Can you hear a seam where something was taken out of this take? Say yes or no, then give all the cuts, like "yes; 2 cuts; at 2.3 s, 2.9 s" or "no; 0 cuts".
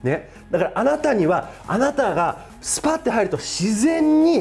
no; 0 cuts